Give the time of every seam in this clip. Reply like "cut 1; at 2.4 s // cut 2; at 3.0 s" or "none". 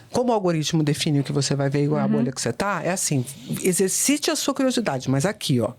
none